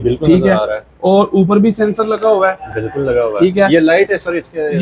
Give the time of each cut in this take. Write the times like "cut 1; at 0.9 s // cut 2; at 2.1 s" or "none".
none